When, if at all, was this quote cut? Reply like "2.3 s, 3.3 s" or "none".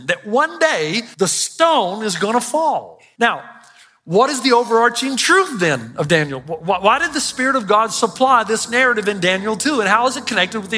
1.0 s, 3.0 s